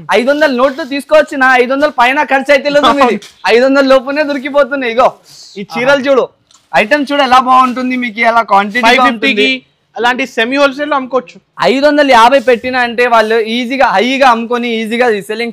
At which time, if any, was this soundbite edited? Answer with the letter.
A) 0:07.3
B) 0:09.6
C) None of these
C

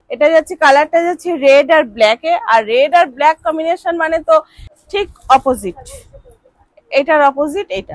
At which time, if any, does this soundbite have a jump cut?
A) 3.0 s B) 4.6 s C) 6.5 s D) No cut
B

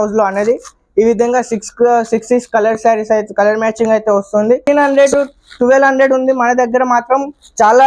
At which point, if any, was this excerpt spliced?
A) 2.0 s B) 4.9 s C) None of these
B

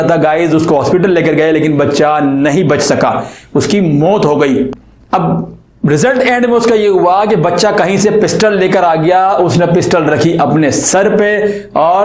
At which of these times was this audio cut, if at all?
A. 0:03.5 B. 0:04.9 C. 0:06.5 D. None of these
B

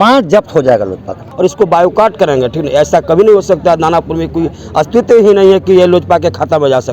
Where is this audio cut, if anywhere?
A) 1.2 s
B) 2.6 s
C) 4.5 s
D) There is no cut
A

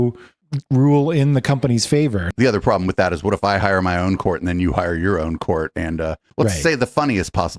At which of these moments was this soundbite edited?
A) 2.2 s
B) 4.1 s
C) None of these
A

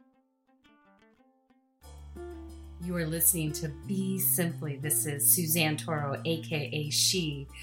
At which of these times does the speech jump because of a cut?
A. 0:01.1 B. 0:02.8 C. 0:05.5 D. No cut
B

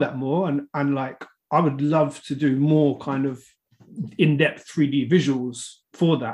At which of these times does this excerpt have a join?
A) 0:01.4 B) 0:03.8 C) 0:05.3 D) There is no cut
D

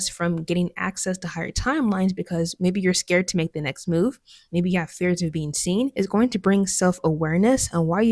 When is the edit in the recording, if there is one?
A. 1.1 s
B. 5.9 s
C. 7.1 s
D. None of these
B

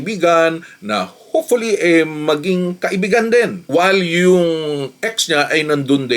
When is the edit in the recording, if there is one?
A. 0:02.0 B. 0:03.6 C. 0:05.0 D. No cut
D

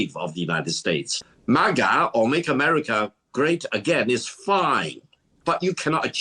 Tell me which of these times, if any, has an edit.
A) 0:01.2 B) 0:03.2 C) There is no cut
A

